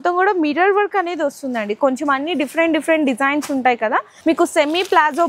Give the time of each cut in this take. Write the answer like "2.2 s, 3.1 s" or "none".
4.1 s